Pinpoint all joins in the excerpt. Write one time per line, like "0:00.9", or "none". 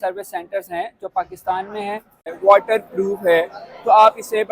0:02.4